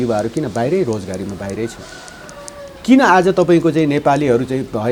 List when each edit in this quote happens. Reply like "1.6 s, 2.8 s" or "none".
none